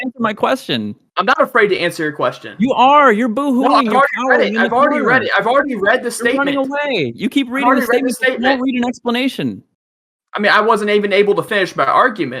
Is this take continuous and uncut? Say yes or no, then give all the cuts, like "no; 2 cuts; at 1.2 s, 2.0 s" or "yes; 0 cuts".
yes; 0 cuts